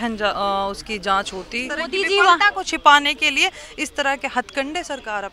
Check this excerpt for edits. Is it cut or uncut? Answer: cut